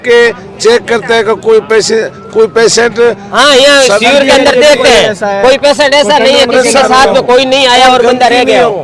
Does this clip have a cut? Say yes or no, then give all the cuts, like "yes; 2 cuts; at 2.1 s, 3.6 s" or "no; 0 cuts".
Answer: no; 0 cuts